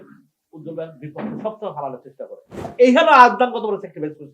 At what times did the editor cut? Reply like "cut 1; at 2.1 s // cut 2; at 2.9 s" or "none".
cut 1; at 2.7 s